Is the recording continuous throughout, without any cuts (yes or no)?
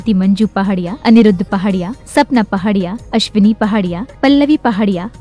yes